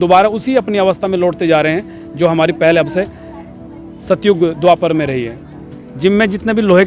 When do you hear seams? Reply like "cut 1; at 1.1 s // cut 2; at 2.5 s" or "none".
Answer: cut 1; at 5.8 s